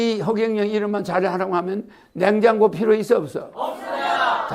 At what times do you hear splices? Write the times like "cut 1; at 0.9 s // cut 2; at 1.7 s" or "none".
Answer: none